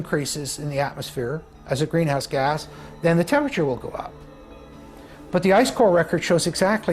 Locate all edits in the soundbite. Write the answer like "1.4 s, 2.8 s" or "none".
none

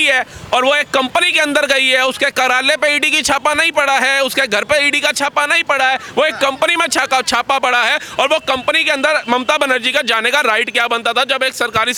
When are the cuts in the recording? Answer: none

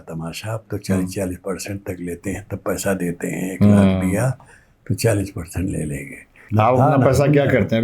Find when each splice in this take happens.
6.4 s

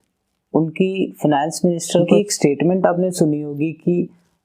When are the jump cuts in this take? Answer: 2.1 s

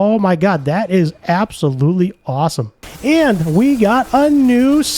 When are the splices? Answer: 2.8 s

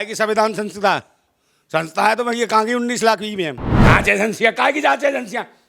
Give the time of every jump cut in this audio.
3.8 s

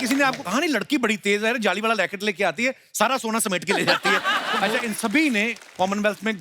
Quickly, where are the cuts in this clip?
4.6 s

